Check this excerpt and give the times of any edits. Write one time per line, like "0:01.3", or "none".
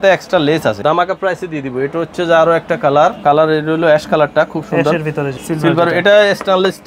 0:00.8
0:03.2
0:05.4